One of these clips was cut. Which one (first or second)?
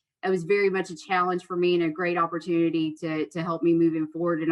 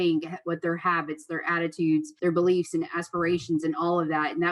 second